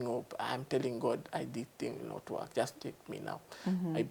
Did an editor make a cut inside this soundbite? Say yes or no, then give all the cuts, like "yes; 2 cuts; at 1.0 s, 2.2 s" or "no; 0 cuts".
no; 0 cuts